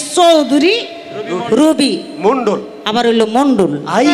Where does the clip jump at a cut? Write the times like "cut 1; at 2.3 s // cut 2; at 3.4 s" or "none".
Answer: none